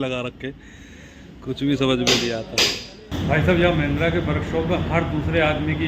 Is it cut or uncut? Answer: cut